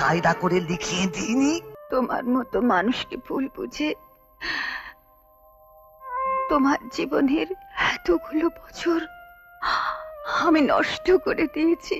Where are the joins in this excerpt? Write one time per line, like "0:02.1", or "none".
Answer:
0:01.7